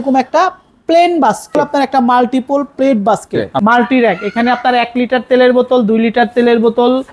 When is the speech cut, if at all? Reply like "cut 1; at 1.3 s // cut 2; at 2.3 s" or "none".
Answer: cut 1; at 1.6 s // cut 2; at 3.5 s